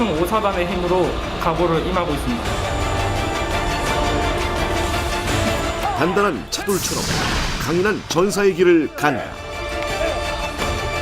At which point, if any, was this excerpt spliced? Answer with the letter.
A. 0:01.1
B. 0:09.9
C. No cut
A